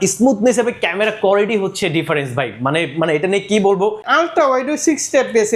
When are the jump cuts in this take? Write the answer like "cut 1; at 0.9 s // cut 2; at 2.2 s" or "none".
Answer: cut 1; at 4.1 s